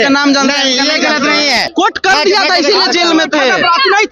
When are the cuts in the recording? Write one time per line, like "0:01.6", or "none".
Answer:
0:01.7